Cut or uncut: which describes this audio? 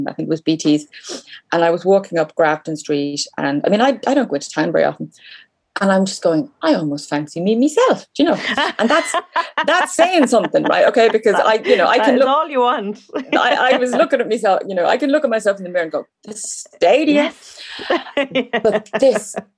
uncut